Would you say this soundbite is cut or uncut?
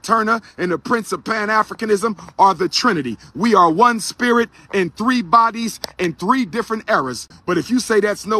cut